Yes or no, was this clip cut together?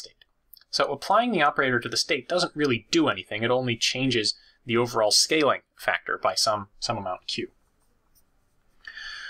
no